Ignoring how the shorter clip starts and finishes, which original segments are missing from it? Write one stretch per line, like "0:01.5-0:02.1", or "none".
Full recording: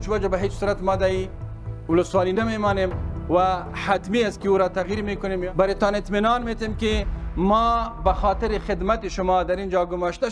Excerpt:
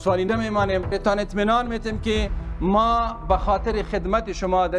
0:03.0-0:05.7